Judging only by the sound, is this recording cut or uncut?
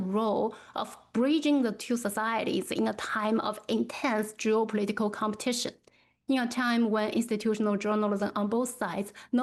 uncut